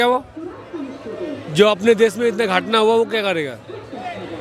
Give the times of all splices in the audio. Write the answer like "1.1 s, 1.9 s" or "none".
none